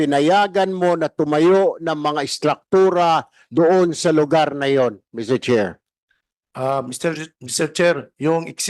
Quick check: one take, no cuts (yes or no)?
yes